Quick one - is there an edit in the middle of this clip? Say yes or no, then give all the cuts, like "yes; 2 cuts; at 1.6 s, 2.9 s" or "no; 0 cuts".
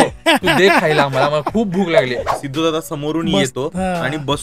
yes; 1 cut; at 2.4 s